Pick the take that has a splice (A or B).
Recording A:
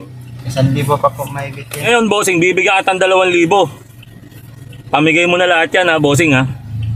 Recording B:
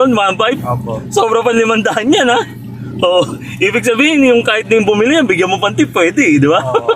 A